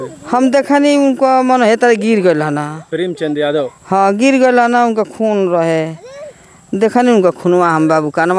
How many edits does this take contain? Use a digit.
0